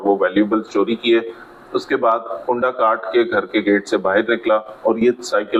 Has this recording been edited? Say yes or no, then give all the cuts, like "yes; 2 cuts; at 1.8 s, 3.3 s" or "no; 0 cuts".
no; 0 cuts